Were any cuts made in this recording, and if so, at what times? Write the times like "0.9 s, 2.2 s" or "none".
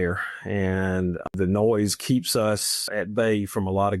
1.3 s, 2.9 s